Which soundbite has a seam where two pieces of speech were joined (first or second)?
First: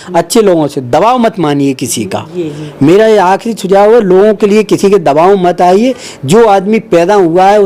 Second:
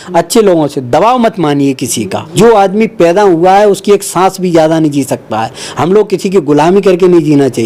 second